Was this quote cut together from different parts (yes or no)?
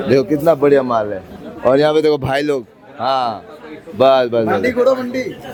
no